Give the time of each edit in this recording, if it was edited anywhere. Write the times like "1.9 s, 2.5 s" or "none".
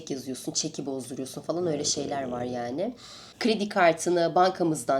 none